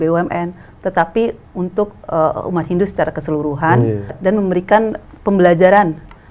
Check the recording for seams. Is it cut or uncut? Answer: cut